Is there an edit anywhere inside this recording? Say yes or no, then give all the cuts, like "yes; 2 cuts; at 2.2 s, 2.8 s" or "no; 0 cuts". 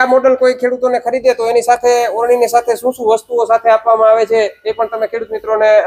no; 0 cuts